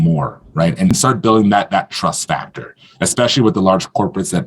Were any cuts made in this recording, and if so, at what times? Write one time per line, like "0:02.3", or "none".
0:00.9